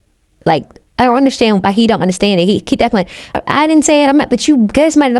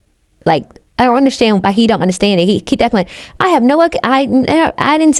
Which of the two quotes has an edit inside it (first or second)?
first